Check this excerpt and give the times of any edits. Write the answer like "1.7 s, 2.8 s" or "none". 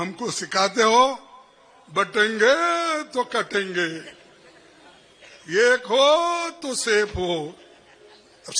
none